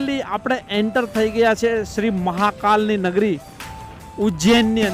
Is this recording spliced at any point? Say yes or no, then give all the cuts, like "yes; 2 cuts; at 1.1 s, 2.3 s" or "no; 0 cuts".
no; 0 cuts